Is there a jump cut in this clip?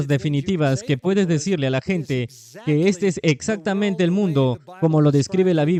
no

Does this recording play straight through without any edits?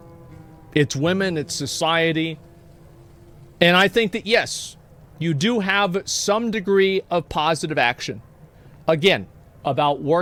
yes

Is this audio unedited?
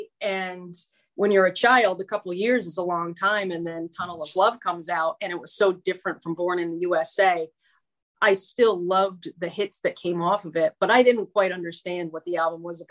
yes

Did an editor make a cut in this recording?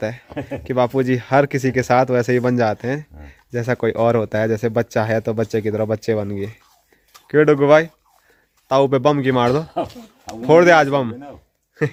no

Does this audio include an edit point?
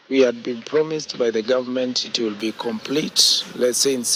no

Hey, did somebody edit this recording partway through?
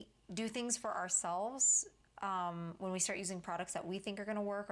no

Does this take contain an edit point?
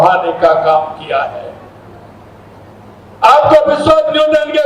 no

